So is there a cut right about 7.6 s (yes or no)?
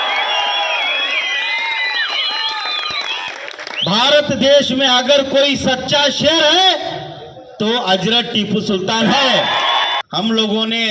no